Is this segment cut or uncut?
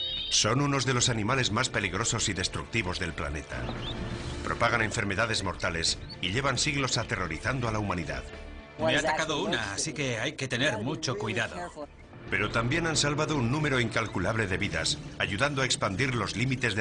uncut